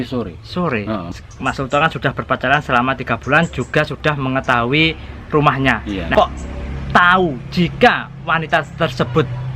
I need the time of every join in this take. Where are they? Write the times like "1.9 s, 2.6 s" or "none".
1.1 s, 6.1 s